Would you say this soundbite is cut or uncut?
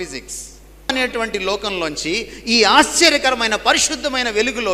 cut